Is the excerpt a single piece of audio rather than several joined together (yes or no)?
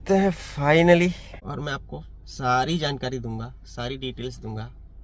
no